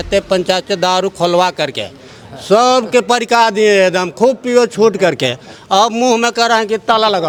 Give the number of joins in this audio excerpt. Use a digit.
0